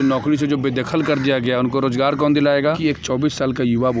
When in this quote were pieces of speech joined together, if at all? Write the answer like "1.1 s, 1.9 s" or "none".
2.8 s